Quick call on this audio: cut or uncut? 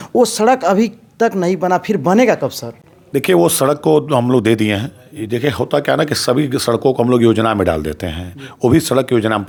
uncut